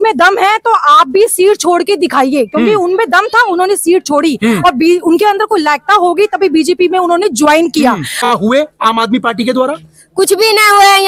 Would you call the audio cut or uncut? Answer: cut